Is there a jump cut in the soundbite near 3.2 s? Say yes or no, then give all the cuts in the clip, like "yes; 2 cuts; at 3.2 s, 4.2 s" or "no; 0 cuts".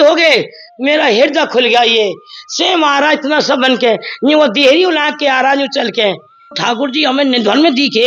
no; 1 cut; at 6.6 s